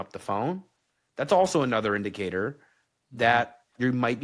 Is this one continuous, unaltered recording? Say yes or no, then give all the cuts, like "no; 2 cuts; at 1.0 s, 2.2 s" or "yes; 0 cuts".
yes; 0 cuts